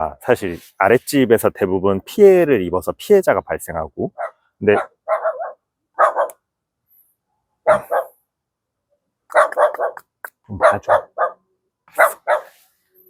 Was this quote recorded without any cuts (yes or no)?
yes